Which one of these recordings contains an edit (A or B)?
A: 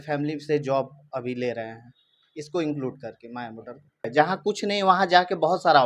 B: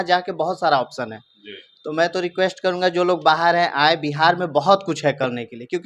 A